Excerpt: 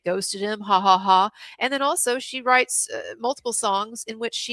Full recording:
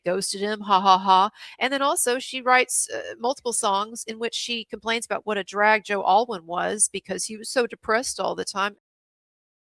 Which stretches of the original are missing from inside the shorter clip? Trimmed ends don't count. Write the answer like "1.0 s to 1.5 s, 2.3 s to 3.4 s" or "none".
none